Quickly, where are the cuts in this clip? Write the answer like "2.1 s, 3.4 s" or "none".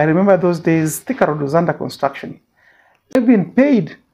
3.1 s